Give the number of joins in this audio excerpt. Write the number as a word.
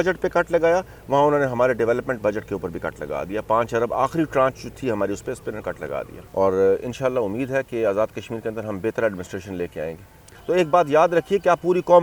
two